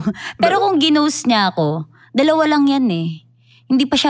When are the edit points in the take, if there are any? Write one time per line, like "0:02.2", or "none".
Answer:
none